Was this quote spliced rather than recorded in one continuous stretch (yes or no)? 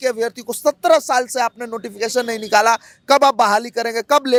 no